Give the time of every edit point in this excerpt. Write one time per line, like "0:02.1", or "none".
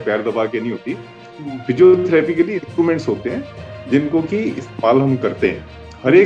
none